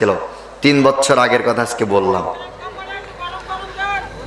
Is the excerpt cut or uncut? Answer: uncut